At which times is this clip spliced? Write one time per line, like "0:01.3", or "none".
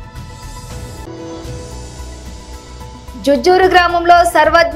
none